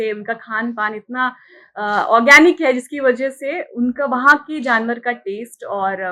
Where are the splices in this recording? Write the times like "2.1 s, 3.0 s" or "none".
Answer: none